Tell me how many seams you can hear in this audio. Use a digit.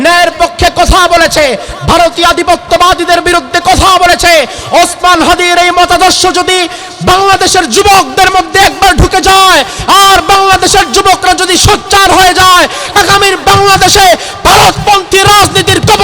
0